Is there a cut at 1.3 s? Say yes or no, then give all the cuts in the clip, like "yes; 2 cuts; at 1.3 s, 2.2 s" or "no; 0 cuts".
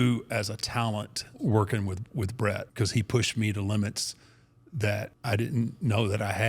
yes; 3 cuts; at 1.3 s, 2.7 s, 5.1 s